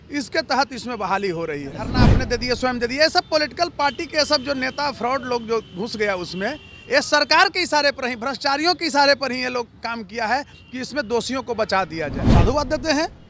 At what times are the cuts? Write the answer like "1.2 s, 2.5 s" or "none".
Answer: 1.9 s, 12.2 s